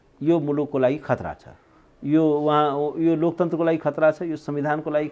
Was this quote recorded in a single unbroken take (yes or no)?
yes